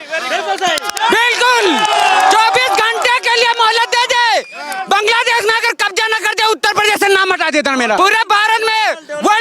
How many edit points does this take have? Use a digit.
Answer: 1